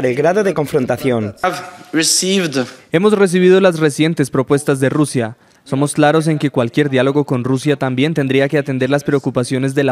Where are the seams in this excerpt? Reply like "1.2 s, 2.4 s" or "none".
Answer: 1.4 s